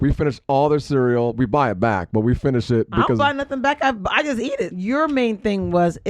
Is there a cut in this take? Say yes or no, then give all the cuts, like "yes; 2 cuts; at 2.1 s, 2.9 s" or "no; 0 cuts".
yes; 1 cut; at 4.7 s